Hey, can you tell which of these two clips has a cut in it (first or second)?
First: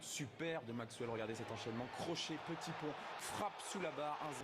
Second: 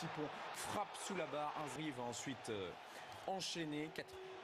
first